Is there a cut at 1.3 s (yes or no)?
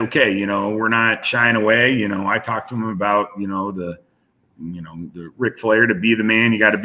yes